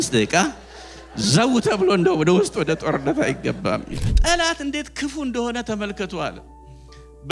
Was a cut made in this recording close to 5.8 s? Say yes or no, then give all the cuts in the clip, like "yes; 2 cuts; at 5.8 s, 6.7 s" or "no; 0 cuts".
no; 1 cut; at 4.1 s